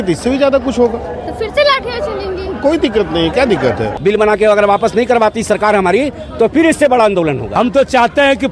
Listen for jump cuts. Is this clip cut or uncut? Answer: cut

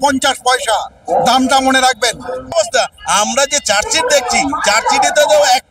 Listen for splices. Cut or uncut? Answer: cut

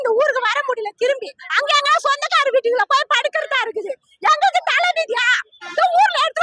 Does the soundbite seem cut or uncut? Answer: uncut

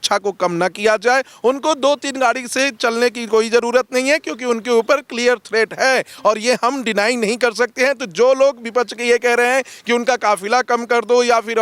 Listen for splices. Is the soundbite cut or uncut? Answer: uncut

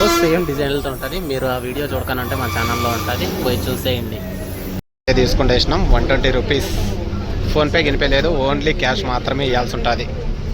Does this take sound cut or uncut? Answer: cut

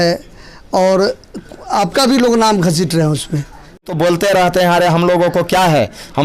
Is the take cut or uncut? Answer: cut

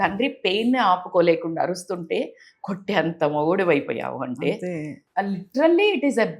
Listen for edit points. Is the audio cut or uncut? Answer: cut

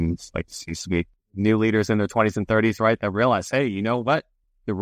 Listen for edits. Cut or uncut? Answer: cut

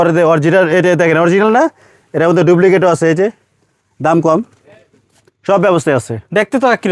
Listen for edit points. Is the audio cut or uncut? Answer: uncut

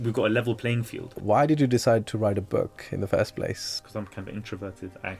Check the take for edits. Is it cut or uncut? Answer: cut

